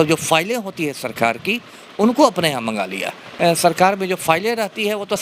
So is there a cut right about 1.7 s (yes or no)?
no